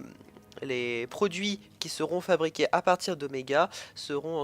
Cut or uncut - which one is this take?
cut